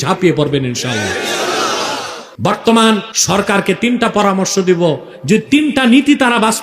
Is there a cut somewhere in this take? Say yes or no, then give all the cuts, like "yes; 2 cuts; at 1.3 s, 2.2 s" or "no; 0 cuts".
yes; 2 cuts; at 2.2 s, 3.1 s